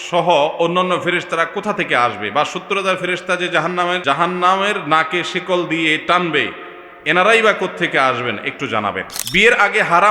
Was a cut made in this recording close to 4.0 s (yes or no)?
yes